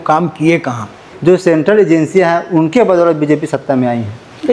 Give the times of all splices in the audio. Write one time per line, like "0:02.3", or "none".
0:01.1